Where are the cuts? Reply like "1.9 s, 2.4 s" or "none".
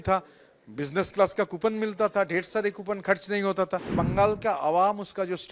3.9 s